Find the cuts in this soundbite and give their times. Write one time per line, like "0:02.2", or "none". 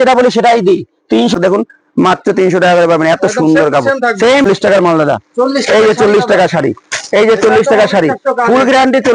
0:01.3
0:04.5